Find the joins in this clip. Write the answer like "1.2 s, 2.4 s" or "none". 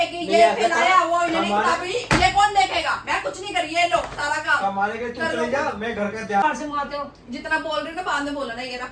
6.4 s

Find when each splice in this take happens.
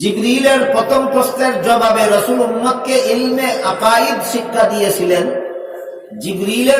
none

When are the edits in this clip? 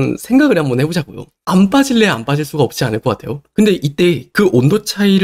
3.4 s

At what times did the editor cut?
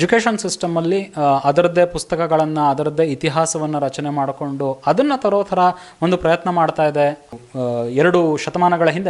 7.3 s

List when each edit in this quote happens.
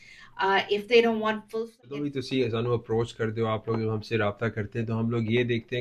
1.8 s

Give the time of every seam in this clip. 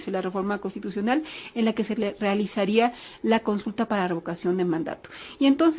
none

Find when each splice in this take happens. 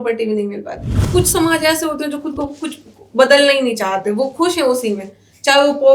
1.0 s

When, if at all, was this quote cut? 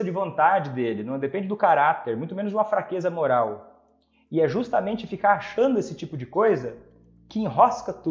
none

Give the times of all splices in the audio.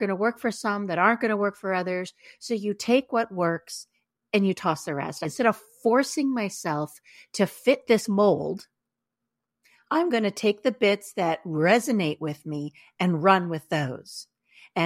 5.2 s

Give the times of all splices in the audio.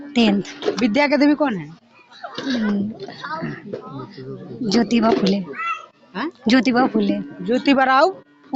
none

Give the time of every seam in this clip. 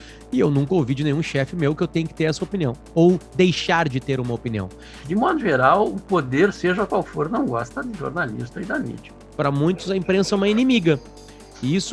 5.0 s, 9.2 s

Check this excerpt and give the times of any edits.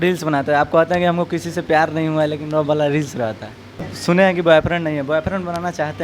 3.9 s

